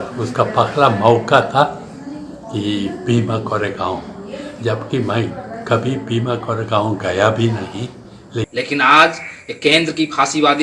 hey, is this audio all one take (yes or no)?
no